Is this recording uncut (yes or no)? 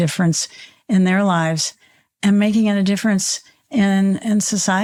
yes